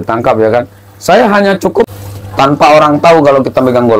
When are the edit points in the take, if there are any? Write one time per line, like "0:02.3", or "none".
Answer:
0:01.9